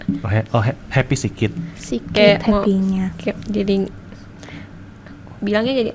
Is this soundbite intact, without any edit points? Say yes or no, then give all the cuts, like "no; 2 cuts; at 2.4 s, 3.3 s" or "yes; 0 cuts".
yes; 0 cuts